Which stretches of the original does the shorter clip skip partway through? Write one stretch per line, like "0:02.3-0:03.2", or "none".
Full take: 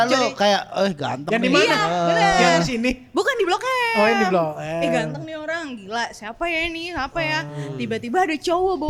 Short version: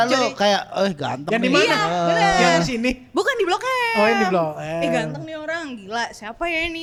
none